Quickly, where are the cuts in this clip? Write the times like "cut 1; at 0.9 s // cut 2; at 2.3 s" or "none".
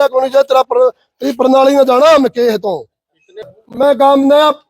cut 1; at 3.6 s